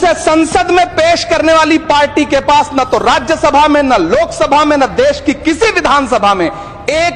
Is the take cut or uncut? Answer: uncut